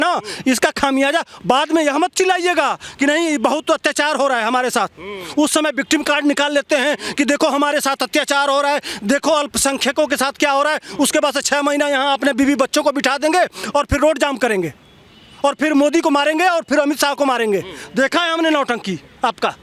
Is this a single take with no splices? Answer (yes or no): yes